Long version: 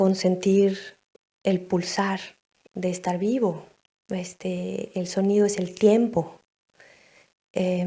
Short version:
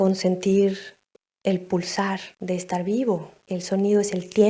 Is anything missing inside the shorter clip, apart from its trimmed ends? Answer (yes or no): yes